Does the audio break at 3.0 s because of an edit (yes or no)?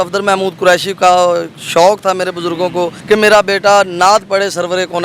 yes